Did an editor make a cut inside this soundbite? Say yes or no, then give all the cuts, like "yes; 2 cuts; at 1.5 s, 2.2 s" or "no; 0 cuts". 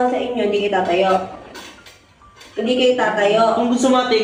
no; 0 cuts